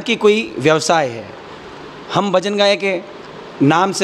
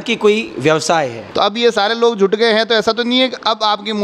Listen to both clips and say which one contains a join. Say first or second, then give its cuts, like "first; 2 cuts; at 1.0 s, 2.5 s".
second; 1 cut; at 1.2 s